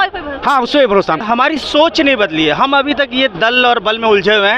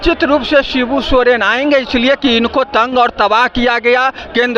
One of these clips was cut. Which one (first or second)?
first